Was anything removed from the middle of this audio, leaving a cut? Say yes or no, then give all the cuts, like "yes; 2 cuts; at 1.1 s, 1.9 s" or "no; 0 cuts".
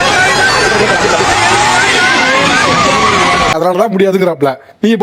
no; 0 cuts